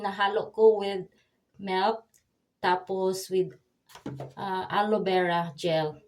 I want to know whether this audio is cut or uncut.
uncut